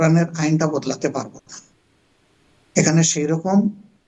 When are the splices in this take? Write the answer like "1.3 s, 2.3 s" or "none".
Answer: none